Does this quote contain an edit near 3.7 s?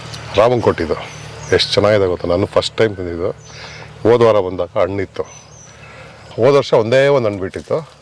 no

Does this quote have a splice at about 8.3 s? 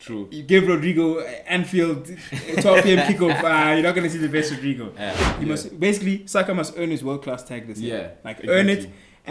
no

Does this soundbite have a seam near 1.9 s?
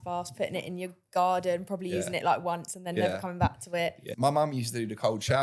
no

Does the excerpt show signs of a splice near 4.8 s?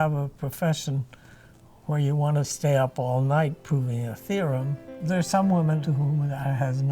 yes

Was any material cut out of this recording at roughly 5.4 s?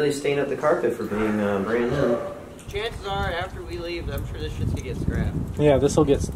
no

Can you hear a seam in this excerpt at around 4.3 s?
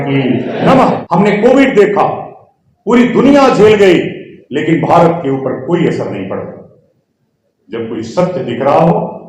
no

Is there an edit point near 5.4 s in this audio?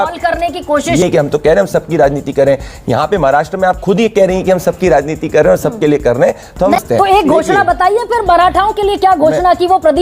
no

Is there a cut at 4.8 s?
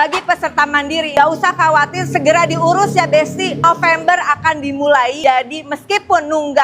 no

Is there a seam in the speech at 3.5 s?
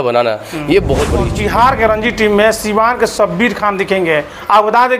no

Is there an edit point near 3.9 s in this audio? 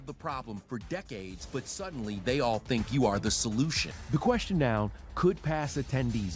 yes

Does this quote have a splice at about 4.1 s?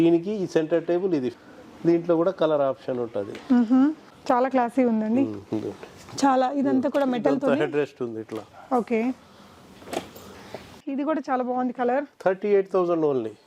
yes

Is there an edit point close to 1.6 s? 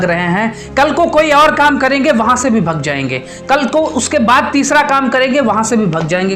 no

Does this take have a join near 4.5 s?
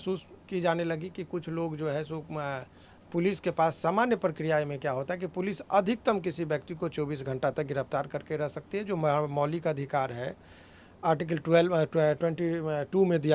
no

